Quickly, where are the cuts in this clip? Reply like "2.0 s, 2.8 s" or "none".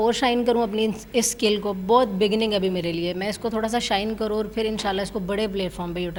none